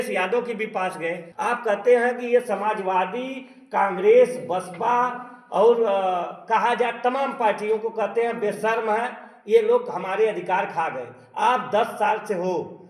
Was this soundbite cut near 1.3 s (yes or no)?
yes